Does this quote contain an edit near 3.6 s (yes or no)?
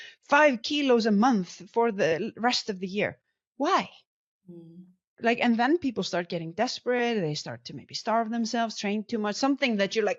no